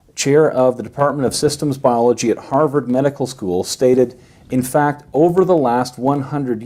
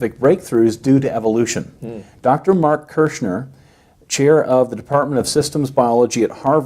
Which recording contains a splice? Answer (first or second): second